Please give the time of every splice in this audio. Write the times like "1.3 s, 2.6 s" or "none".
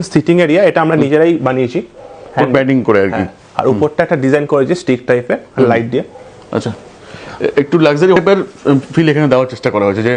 none